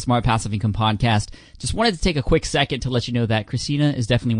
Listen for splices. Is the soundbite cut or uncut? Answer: uncut